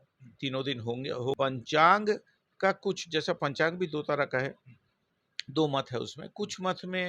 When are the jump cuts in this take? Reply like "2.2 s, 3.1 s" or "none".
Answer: 1.4 s